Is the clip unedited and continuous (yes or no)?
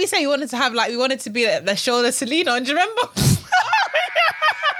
yes